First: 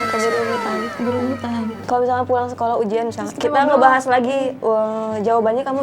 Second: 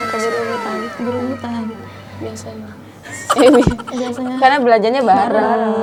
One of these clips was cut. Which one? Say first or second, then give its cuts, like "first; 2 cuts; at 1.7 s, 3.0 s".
first; 1 cut; at 1.8 s